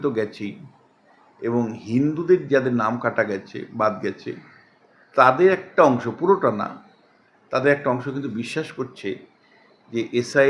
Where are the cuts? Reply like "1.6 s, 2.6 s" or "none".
none